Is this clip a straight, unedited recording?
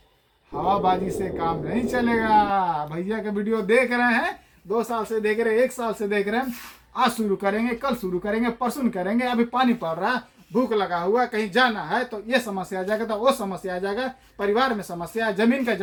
yes; 0 cuts

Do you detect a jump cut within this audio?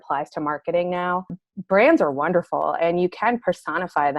yes; 1 cut; at 1.5 s

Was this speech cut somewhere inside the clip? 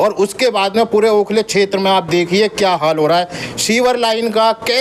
no; 0 cuts

